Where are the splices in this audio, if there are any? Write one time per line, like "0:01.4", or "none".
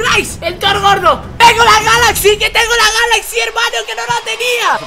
none